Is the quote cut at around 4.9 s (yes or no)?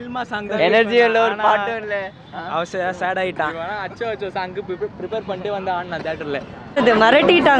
no